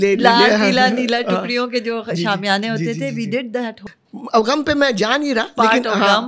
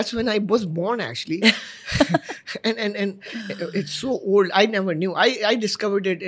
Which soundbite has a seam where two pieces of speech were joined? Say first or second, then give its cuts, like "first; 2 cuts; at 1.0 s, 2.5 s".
first; 1 cut; at 3.8 s